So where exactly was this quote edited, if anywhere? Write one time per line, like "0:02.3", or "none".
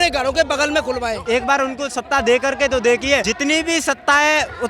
0:01.2
0:03.3